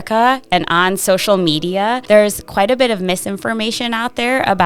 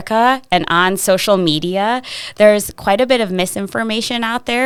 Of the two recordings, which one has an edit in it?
first; 1 cut; at 2.0 s

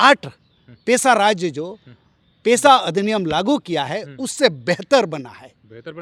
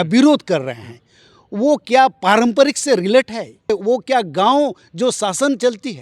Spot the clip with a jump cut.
second; 1 cut; at 3.7 s

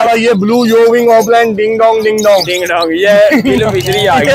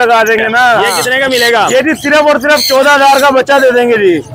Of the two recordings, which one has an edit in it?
second; 1 cut; at 1.0 s

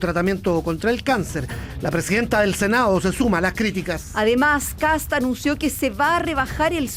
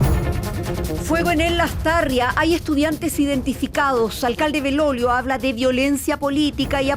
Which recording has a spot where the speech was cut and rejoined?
second; 1 cut; at 1.1 s

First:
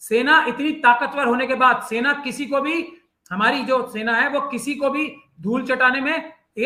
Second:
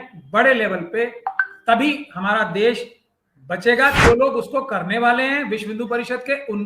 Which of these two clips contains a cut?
second; 1 cut; at 4.0 s

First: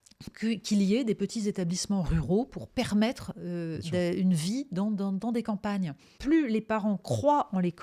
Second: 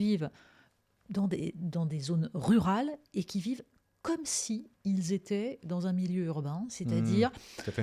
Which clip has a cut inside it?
first; 1 cut; at 6.1 s

